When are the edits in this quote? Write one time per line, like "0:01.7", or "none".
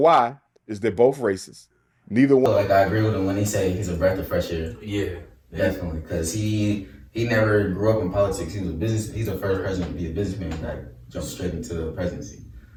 none

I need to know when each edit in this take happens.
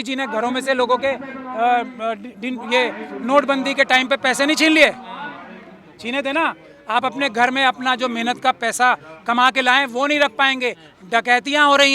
none

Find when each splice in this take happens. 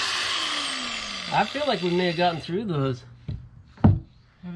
none

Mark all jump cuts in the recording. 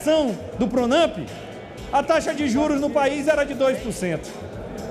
none

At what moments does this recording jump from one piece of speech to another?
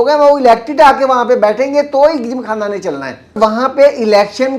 0:03.4

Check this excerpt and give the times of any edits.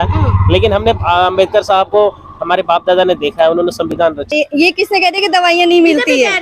0:04.3

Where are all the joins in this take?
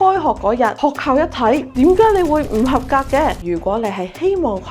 0:00.8
0:03.4

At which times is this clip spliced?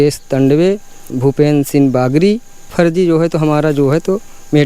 0:01.1
0:02.7

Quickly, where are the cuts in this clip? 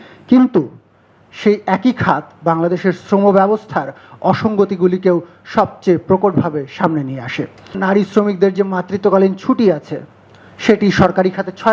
0:07.8

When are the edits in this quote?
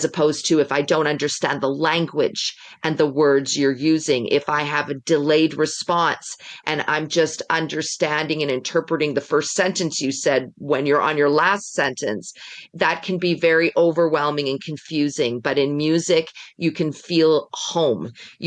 none

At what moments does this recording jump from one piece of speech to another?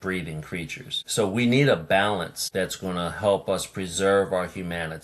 0:01.0
0:02.4

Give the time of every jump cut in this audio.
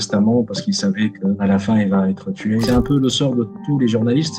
0:01.4
0:02.6

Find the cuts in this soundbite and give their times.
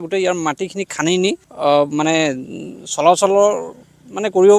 0:01.5

